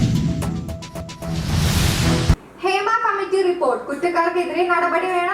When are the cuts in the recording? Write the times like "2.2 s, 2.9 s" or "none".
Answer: 1.2 s